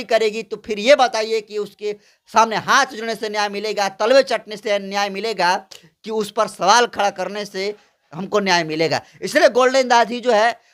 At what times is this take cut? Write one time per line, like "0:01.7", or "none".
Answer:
none